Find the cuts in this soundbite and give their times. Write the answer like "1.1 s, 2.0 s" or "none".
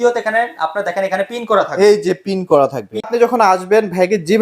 3.0 s